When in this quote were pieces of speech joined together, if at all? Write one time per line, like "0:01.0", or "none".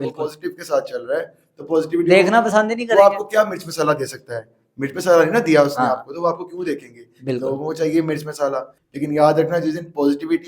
0:08.8